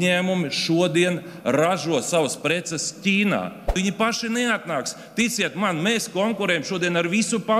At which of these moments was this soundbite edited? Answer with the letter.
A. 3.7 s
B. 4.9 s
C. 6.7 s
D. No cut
A